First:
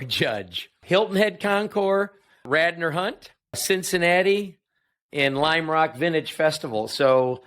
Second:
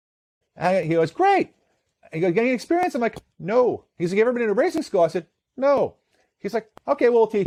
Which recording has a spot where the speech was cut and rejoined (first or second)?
first